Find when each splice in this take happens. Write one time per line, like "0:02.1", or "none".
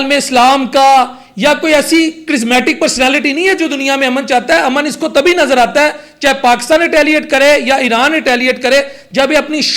none

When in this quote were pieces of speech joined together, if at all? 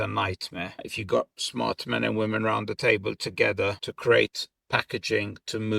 0:03.9

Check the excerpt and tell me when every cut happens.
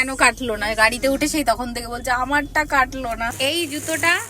0:03.3

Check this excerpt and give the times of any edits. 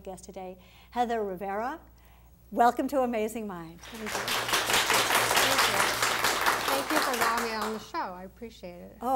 0:04.5

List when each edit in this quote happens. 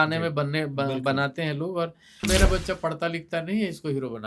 0:02.2

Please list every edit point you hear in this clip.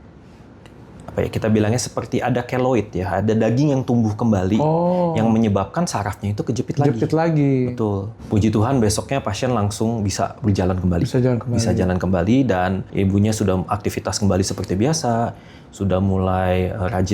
0:08.1
0:12.8

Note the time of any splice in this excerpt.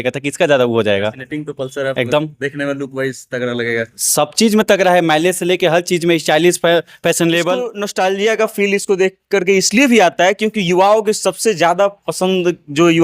0:07.8

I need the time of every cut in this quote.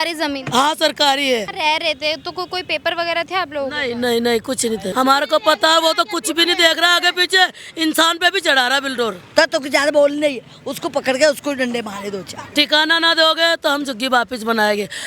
0:01.5
0:04.9
0:09.2
0:12.5

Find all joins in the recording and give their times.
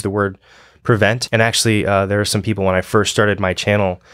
0:01.2

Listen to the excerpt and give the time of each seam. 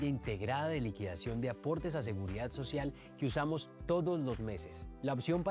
0:03.5

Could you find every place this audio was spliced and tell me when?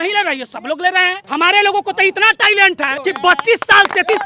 0:01.2
0:02.9

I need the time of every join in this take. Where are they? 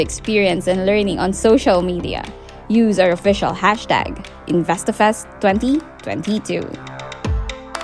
0:06.9

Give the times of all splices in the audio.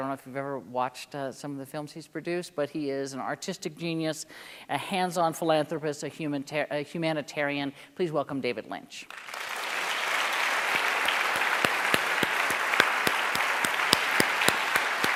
none

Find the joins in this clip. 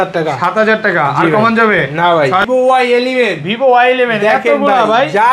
0:02.4

